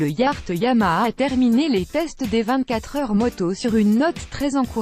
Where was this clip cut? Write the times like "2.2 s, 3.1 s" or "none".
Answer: 0.9 s